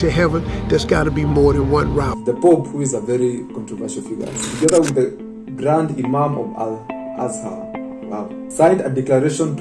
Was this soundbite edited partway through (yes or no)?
yes